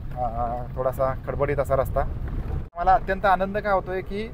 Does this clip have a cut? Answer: yes; 1 cut; at 2.8 s

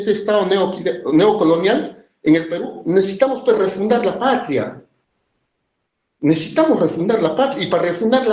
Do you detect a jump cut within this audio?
no; 0 cuts

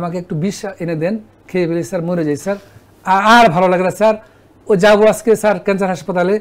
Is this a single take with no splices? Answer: yes; 0 cuts

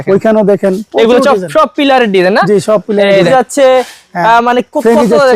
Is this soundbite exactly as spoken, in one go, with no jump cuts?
no; 1 cut; at 3.3 s

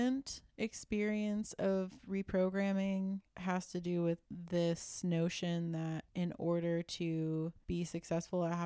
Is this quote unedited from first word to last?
no; 4 cuts; at 3.3 s, 4.2 s, 6.0 s, 7.6 s

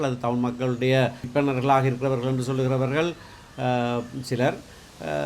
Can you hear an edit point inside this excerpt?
yes; 1 cut; at 1.3 s

